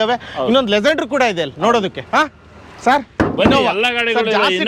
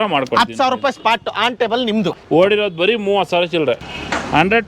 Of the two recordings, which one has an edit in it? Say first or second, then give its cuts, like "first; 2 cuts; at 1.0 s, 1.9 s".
second; 2 cuts; at 2.1 s, 3.8 s